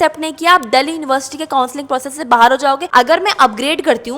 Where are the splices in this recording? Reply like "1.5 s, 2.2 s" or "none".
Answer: 2.8 s